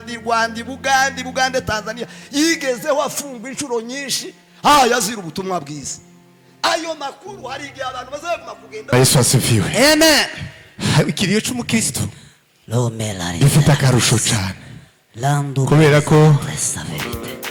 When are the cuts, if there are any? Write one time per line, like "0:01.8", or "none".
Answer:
0:08.9